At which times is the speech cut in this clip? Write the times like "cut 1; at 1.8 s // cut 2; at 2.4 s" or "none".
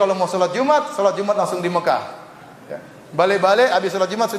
none